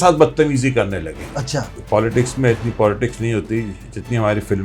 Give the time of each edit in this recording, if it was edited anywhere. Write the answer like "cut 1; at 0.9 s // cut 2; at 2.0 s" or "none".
cut 1; at 1.7 s